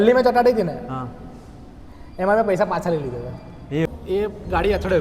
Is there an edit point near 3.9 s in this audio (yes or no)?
yes